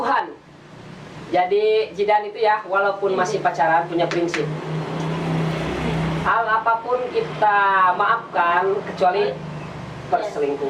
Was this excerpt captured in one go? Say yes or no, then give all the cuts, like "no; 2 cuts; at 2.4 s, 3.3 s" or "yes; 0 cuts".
yes; 0 cuts